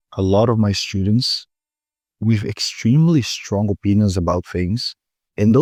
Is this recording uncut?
yes; 0 cuts

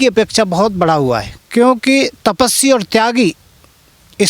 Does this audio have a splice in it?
yes; 1 cut; at 1.4 s

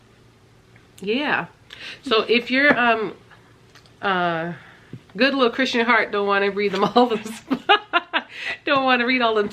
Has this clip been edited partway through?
no; 0 cuts

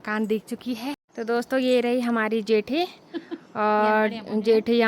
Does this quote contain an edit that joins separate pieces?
yes; 1 cut; at 1.1 s

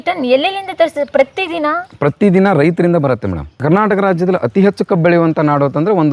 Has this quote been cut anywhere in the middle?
yes; 1 cut; at 3.5 s

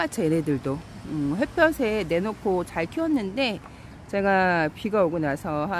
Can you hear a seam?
no; 0 cuts

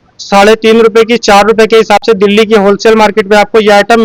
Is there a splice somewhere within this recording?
no; 0 cuts

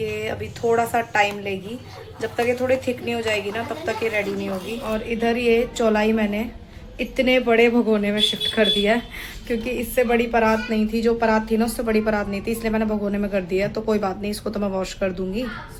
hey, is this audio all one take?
yes; 0 cuts

